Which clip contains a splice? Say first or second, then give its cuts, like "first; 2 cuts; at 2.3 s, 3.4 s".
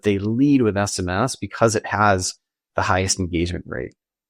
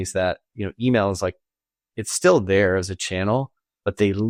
first; 1 cut; at 1.4 s